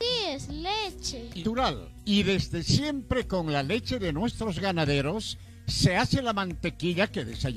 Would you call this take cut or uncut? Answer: cut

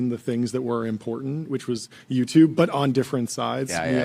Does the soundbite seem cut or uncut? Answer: uncut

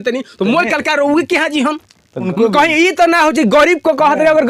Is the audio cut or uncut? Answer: cut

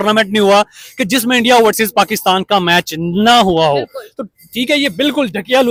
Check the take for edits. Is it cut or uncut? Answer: uncut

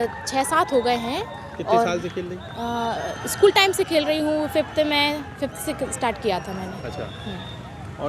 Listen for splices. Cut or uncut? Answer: uncut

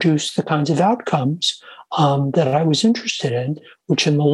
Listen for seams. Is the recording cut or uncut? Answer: uncut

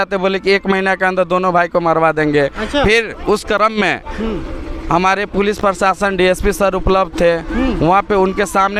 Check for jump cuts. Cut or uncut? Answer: uncut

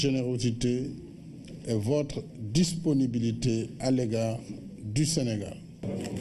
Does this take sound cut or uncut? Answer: uncut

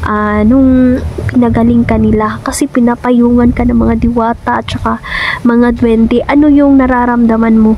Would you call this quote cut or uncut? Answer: uncut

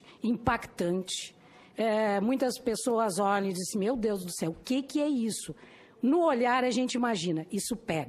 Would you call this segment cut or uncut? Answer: uncut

